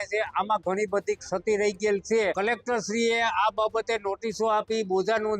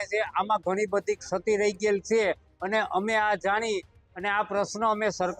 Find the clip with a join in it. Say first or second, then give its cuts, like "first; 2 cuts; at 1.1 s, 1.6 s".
first; 1 cut; at 2.4 s